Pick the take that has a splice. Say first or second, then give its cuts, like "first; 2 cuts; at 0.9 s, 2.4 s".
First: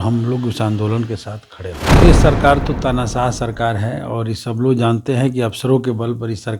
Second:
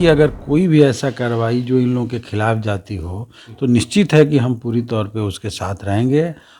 first; 1 cut; at 2.0 s